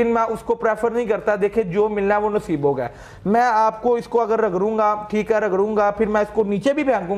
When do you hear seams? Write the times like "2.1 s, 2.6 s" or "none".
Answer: none